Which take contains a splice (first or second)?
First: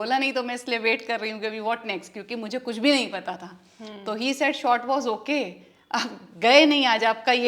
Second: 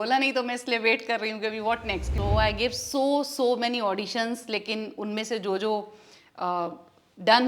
second